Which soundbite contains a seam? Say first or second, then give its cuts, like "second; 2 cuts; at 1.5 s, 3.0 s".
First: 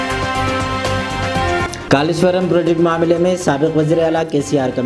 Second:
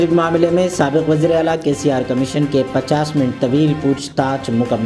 first; 1 cut; at 1.8 s